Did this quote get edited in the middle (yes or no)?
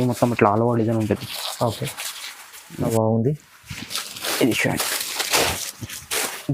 yes